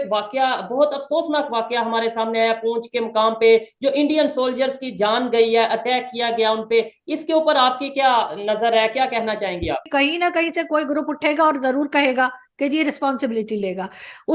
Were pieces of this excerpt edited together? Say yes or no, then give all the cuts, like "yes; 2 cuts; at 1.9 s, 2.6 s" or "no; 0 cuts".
yes; 1 cut; at 9.9 s